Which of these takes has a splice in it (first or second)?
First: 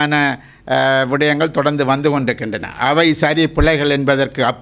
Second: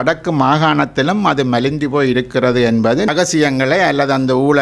second